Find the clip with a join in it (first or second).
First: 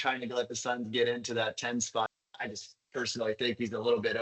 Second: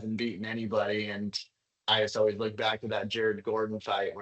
first